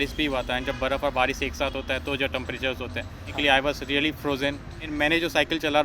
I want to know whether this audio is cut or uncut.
cut